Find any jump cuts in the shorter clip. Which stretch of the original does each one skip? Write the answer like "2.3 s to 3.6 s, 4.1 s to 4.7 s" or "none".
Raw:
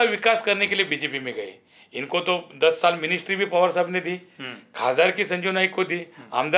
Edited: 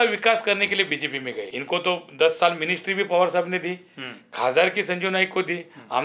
1.5 s to 1.9 s